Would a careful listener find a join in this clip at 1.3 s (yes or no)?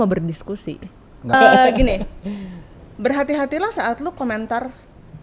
yes